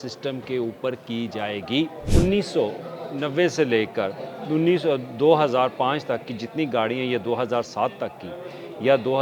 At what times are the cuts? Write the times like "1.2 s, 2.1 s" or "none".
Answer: 2.0 s

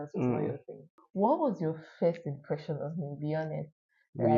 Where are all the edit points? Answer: 1.0 s

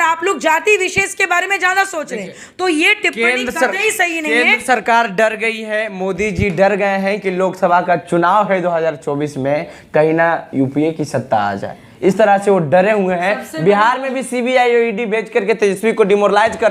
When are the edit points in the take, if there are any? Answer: none

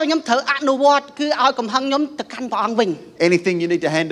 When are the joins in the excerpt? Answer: none

